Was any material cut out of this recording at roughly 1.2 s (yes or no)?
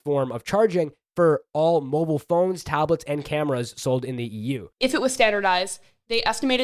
no